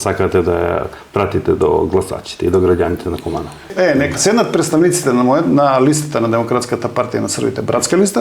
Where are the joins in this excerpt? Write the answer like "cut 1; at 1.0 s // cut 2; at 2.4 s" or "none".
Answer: cut 1; at 3.7 s